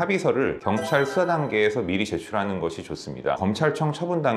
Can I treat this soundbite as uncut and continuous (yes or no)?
no